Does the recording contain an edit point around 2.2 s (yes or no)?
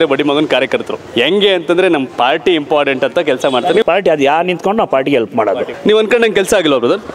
no